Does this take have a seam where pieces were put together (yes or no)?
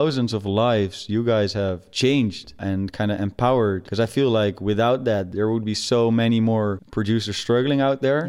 yes